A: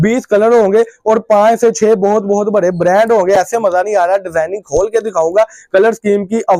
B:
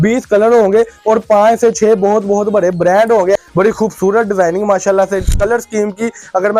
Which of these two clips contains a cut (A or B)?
B